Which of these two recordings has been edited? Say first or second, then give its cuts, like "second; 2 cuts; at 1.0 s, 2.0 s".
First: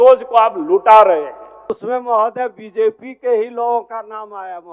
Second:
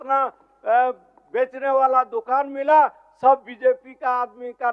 first; 1 cut; at 1.7 s